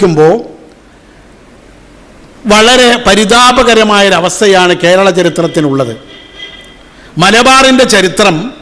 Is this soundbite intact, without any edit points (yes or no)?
yes